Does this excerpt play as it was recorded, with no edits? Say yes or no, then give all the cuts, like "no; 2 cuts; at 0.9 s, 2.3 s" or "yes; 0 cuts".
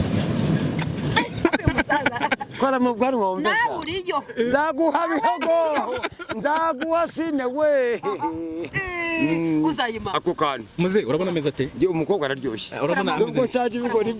yes; 0 cuts